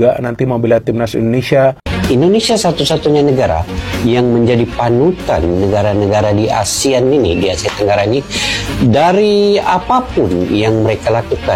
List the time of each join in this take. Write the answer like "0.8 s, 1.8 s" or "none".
1.9 s